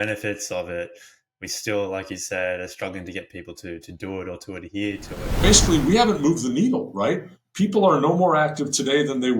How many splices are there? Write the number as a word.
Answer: one